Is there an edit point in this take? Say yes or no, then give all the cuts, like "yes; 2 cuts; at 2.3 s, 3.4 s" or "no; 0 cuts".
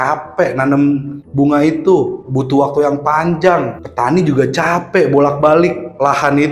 no; 0 cuts